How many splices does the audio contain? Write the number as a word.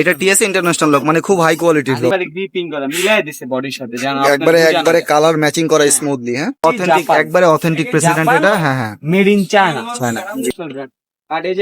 three